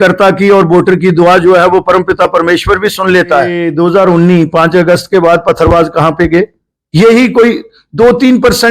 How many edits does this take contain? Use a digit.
1